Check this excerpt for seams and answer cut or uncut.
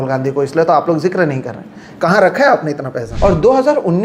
cut